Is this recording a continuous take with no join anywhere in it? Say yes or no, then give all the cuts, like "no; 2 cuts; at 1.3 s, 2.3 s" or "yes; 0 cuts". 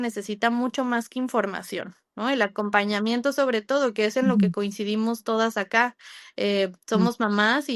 yes; 0 cuts